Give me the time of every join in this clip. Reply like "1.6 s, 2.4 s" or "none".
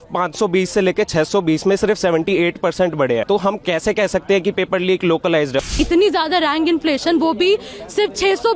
3.2 s, 5.7 s